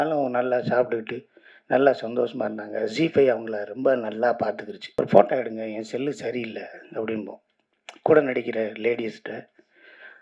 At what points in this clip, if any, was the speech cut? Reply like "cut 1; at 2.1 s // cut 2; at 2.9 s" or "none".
cut 1; at 4.8 s